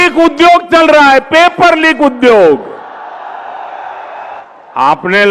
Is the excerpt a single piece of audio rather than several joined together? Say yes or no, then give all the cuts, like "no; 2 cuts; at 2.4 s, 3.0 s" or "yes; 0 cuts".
no; 1 cut; at 4.2 s